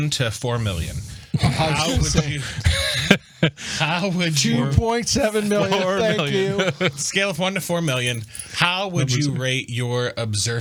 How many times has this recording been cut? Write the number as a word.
zero